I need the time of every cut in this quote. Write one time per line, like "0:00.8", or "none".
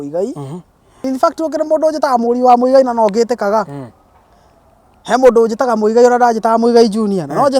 0:01.0